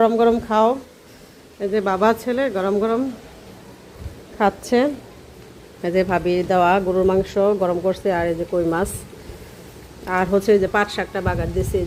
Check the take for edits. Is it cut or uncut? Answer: uncut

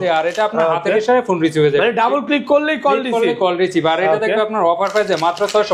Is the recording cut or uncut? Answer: uncut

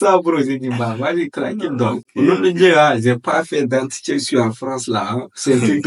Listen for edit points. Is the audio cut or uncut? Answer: uncut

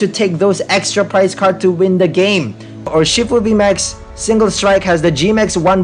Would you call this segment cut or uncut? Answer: cut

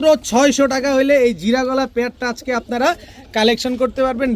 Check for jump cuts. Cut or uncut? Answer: uncut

